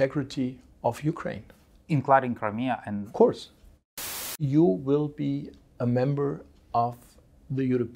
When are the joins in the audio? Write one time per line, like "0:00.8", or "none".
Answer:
0:03.7